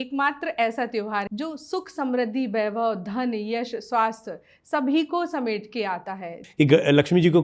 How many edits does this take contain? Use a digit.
2